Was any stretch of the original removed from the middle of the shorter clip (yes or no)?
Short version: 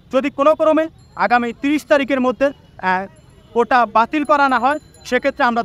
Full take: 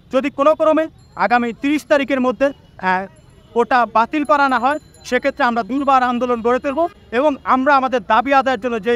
no